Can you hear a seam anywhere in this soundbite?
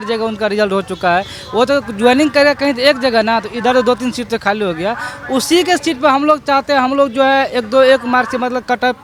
no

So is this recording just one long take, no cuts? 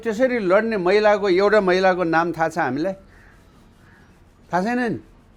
yes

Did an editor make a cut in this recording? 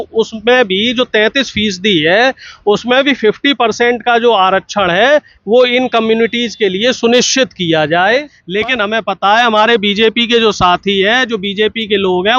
yes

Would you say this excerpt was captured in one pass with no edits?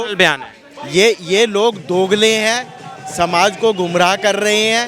yes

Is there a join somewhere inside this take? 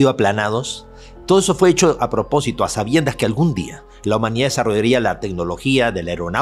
no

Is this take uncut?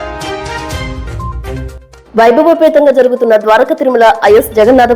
yes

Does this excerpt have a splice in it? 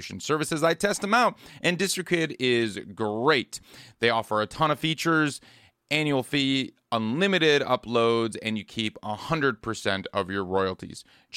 no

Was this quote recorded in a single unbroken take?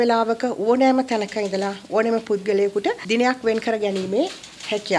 no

